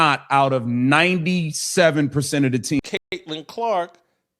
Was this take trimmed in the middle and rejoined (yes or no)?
yes